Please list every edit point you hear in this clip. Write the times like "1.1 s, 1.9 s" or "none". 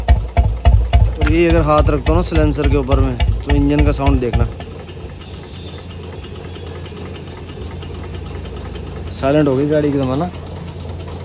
none